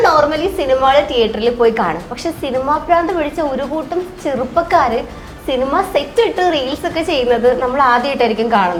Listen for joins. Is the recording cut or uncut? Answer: uncut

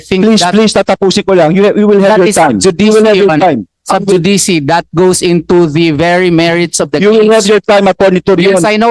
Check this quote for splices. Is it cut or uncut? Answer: uncut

